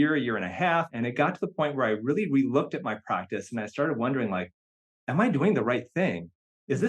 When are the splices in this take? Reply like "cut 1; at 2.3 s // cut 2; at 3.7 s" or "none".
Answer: cut 1; at 0.9 s